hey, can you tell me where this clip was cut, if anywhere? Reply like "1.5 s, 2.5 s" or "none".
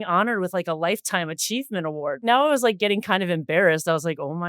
2.2 s